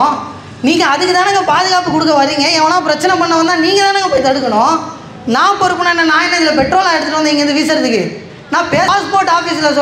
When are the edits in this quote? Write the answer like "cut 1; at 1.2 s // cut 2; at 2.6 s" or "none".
cut 1; at 8.9 s